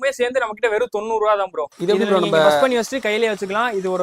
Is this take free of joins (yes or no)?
no